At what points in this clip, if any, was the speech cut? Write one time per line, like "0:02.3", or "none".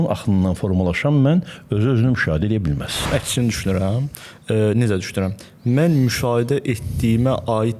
0:03.1